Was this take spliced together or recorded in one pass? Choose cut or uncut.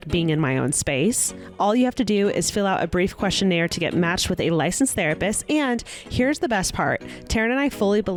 uncut